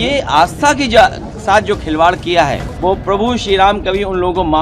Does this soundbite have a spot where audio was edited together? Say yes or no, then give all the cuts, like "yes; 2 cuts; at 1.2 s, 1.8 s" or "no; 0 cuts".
yes; 1 cut; at 2.7 s